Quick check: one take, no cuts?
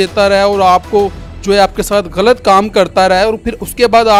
yes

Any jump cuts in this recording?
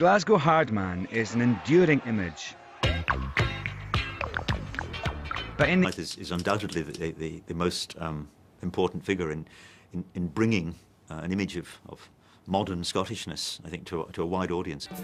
no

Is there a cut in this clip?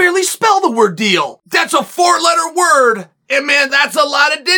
yes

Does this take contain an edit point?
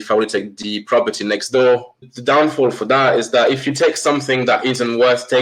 yes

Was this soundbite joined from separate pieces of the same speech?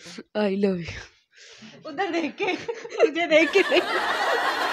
no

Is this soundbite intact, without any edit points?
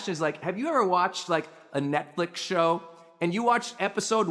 yes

